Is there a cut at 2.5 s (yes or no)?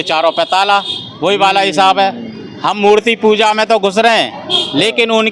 no